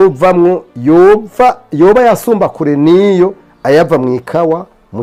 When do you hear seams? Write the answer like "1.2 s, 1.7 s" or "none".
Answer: none